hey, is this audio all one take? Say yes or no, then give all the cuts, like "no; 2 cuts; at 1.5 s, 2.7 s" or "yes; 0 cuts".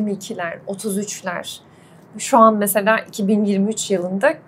yes; 0 cuts